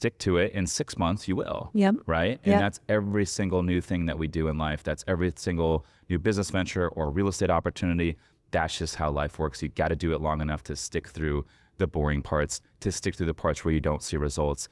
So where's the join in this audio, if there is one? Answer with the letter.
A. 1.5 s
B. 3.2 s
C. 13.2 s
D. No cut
D